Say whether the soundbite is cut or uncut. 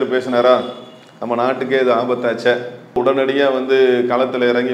uncut